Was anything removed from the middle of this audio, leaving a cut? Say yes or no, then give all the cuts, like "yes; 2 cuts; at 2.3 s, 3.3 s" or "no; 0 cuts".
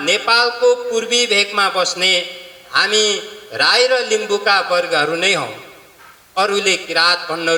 no; 0 cuts